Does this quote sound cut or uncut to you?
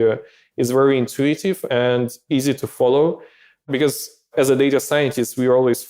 cut